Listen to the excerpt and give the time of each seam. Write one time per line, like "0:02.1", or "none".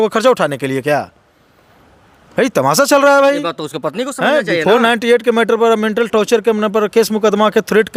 none